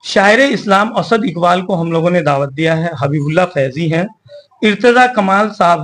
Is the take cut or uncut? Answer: uncut